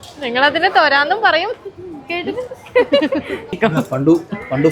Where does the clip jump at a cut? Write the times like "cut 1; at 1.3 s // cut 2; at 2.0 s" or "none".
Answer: cut 1; at 3.5 s